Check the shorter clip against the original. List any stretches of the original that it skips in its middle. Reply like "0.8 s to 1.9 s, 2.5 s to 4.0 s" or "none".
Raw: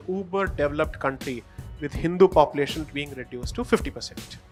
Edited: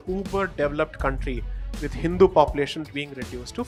none

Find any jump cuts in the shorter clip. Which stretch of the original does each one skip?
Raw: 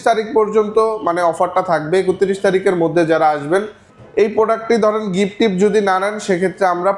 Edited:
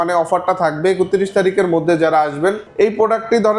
3.7 s to 4.0 s

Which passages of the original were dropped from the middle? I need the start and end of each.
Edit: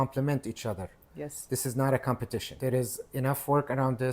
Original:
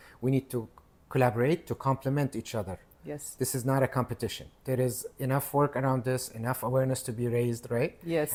4.4 s to 4.5 s

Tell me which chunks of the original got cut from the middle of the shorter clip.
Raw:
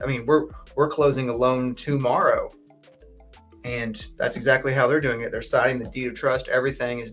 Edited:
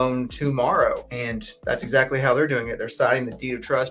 2.6 s to 3.6 s

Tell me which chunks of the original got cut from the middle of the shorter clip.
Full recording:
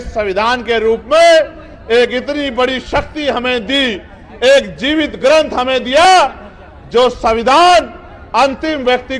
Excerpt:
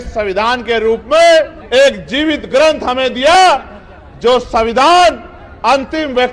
1.6 s to 4.3 s

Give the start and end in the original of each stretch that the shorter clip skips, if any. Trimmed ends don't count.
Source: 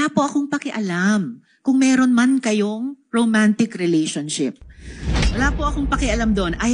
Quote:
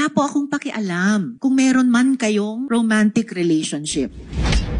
1.3 s to 1.6 s, 2.8 s to 3.0 s

